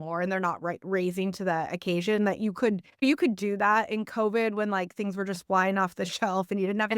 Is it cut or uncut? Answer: cut